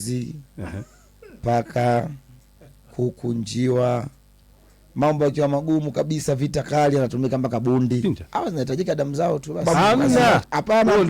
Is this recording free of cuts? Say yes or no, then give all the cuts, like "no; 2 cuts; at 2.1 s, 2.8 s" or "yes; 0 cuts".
no; 2 cuts; at 8.0 s, 9.6 s